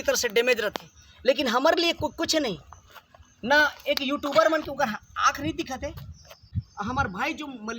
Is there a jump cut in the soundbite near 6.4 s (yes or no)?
yes